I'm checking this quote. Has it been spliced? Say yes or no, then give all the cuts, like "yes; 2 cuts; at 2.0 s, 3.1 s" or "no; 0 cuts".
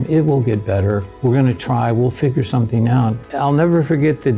no; 0 cuts